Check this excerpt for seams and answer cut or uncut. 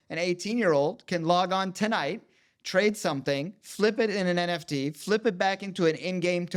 uncut